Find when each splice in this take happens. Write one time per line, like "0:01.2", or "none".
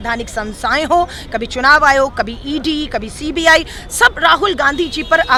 none